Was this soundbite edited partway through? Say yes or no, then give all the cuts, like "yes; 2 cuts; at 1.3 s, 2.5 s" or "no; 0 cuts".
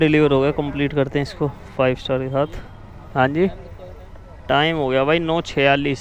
no; 0 cuts